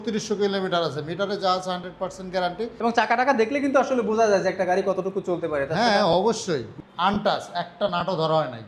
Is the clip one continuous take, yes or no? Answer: no